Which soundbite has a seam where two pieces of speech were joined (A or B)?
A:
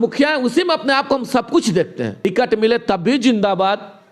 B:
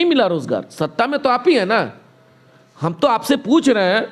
A